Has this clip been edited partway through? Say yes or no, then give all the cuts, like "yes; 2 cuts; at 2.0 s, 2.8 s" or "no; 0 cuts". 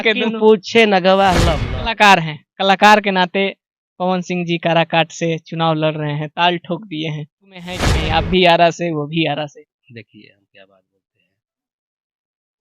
yes; 2 cuts; at 1.6 s, 7.9 s